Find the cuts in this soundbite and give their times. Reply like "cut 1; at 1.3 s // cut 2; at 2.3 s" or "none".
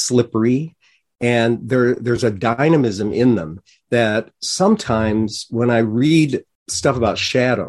cut 1; at 6.6 s

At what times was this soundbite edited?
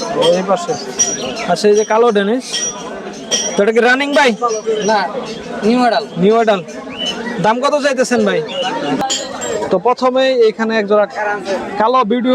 cut 1; at 9.0 s

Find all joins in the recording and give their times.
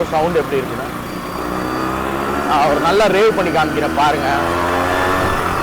none

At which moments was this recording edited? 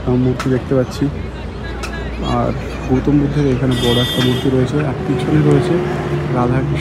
none

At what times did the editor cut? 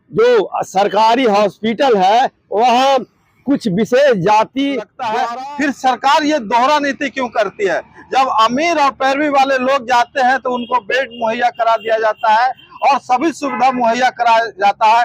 cut 1; at 5.0 s

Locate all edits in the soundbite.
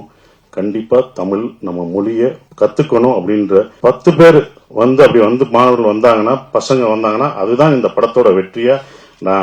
cut 1; at 2.4 s // cut 2; at 3.7 s

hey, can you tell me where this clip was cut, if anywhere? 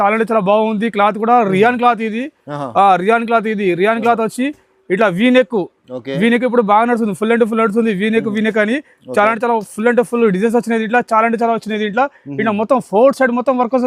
none

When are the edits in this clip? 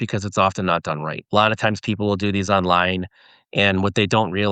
cut 1; at 1.2 s

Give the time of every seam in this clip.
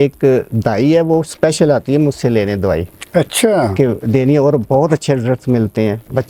none

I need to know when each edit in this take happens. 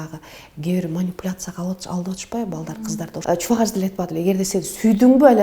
cut 1; at 3.2 s

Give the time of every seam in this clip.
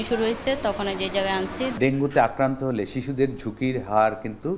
cut 1; at 1.8 s

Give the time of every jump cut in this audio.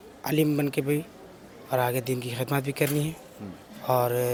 none

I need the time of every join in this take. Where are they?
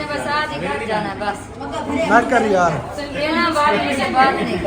none

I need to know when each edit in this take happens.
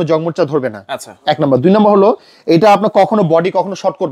none

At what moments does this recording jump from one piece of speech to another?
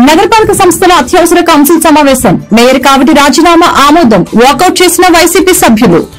none

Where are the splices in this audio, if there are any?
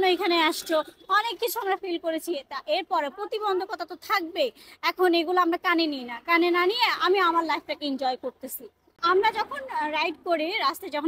cut 1; at 8.9 s

